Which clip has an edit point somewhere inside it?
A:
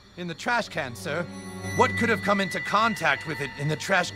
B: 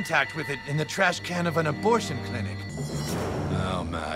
B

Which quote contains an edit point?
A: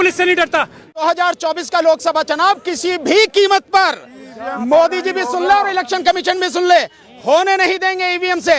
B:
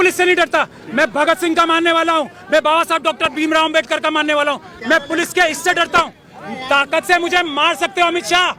A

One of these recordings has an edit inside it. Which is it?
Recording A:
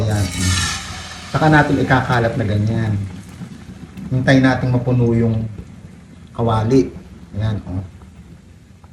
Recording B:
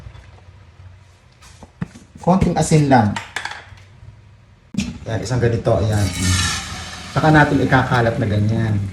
B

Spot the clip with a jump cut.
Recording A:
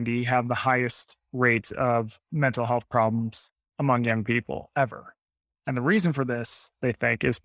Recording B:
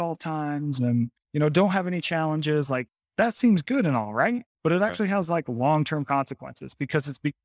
B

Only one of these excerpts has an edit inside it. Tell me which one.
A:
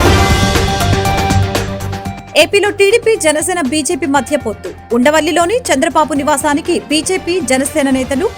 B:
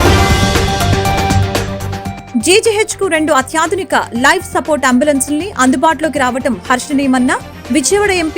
B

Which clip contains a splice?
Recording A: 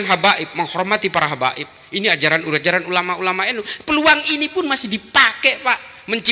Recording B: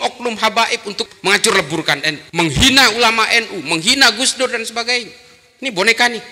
B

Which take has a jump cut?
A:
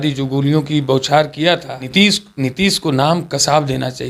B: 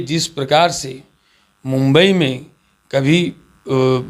A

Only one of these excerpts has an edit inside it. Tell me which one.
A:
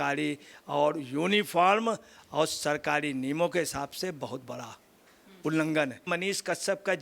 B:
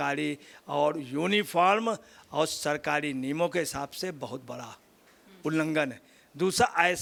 A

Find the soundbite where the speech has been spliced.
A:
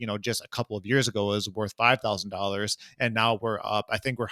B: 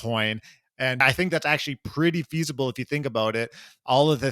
B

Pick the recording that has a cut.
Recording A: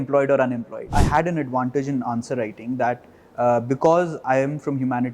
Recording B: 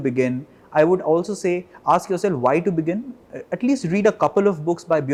A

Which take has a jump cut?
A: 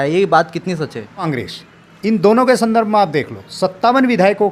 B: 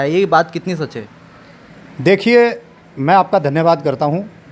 A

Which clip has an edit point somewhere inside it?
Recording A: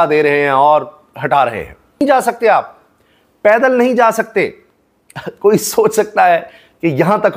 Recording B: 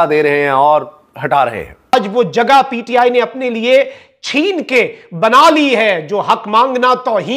B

